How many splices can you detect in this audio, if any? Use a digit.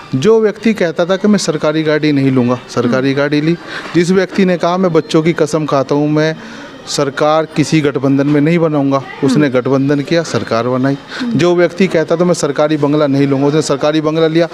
0